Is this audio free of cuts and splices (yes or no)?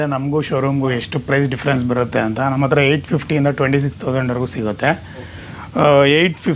yes